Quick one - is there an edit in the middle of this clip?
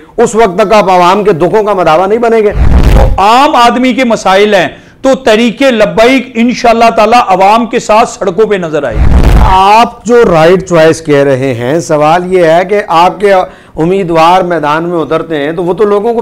yes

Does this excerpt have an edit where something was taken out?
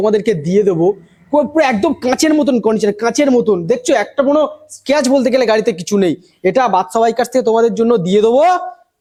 no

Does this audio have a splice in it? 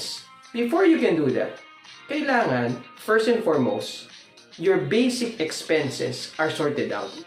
no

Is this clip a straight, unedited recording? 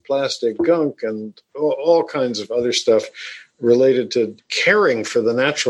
no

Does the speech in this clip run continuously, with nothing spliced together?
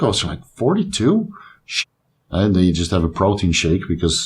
no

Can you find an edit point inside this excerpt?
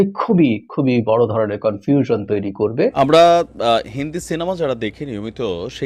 yes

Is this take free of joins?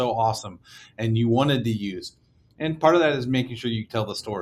yes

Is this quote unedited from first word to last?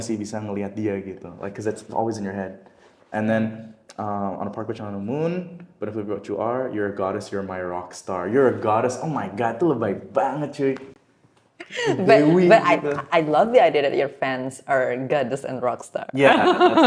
yes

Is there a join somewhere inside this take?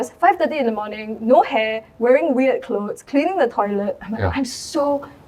no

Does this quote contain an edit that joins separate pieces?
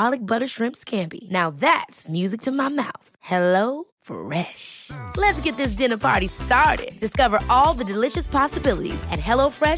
no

